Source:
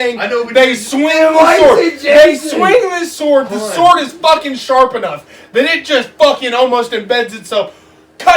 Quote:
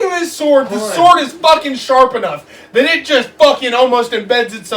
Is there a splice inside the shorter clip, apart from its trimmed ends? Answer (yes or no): no